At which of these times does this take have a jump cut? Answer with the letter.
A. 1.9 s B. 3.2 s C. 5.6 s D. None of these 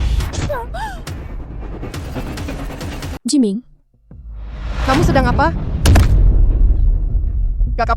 B